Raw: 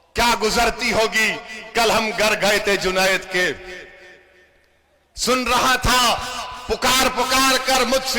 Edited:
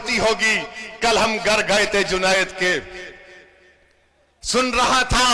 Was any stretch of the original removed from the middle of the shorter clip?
no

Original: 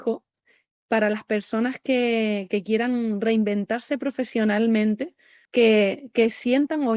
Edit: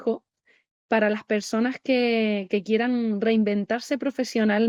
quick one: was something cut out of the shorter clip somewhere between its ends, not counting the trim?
no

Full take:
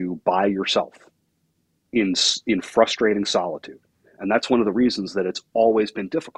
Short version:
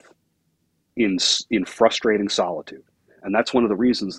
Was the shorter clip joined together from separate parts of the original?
no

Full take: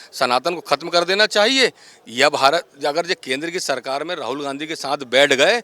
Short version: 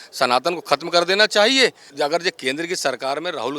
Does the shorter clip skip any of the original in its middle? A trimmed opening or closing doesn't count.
yes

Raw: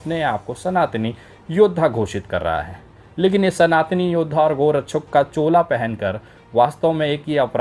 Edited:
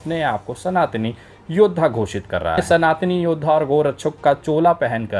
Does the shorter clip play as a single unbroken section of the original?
no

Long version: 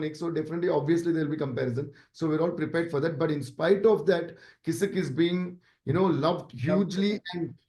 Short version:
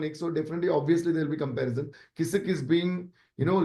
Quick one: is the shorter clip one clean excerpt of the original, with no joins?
no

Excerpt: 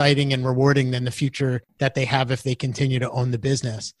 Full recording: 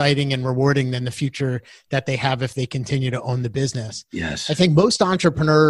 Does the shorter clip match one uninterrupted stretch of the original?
no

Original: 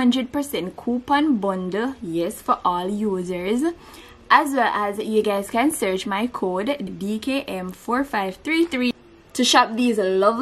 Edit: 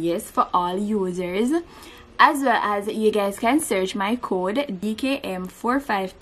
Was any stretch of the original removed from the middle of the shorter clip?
yes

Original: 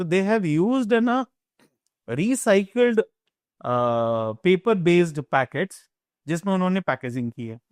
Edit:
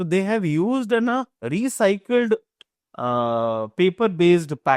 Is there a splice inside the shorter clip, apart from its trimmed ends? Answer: yes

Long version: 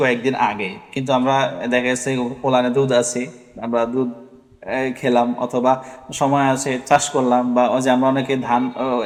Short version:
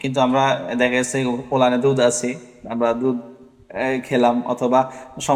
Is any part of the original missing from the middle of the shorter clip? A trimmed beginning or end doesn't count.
no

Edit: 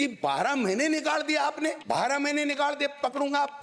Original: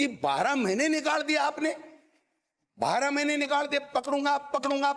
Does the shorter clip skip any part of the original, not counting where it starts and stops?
yes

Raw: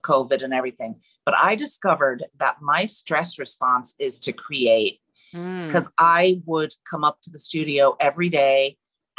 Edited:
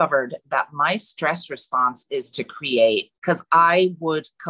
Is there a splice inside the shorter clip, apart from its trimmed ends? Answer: yes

